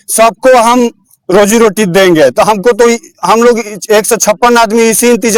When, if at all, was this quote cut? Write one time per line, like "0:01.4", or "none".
none